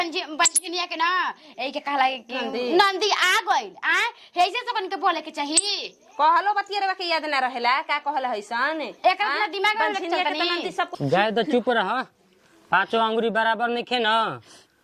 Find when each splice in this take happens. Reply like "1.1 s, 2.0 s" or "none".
10.9 s